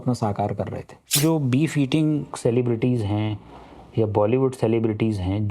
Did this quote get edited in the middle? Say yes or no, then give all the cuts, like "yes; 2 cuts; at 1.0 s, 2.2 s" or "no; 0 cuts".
yes; 1 cut; at 1.2 s